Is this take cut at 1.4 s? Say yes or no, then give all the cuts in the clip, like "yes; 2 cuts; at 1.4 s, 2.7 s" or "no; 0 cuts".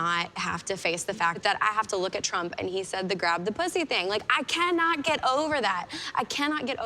yes; 1 cut; at 1.4 s